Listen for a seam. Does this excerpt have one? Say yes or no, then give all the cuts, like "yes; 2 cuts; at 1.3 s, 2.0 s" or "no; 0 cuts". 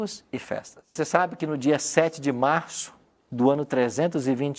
yes; 1 cut; at 1.0 s